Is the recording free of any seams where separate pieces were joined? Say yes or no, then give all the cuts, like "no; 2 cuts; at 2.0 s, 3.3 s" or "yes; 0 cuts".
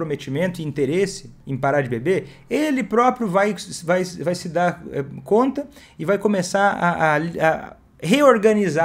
yes; 0 cuts